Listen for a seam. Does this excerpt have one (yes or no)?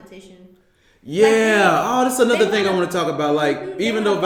no